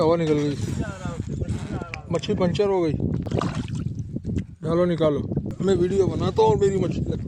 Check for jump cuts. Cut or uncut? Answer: cut